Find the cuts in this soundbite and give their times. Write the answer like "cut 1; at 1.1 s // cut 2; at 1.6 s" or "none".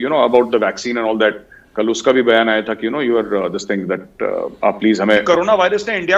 cut 1; at 5.2 s